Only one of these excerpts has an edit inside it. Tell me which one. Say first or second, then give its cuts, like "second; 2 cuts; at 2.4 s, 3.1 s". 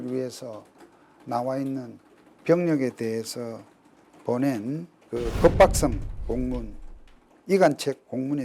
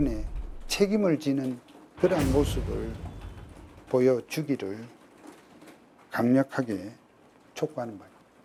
first; 1 cut; at 4.9 s